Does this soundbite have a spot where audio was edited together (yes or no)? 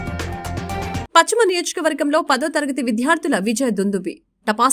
yes